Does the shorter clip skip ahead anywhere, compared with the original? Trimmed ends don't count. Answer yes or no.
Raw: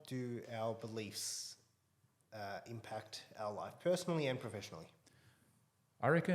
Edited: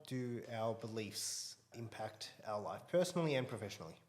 yes